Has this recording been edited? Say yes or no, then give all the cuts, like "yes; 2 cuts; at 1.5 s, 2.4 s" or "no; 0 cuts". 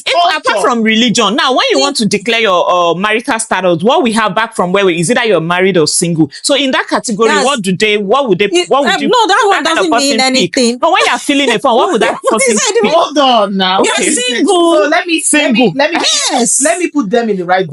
no; 0 cuts